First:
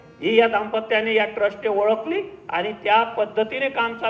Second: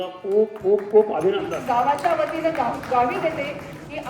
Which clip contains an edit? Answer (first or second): second